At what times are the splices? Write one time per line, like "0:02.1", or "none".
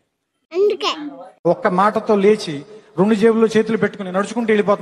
none